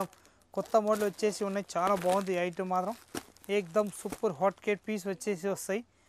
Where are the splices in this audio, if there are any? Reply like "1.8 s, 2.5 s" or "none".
none